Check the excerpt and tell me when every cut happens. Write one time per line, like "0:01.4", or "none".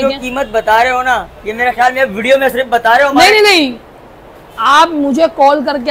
none